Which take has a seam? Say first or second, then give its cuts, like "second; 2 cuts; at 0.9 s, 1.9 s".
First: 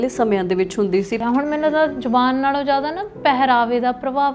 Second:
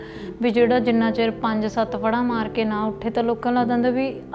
first; 1 cut; at 1.2 s